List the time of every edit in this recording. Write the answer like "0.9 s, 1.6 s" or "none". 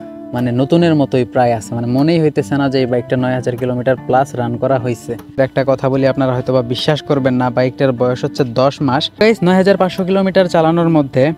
5.4 s, 9.2 s